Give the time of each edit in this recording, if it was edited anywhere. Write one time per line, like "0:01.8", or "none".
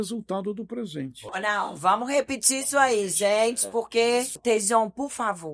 0:01.3
0:04.4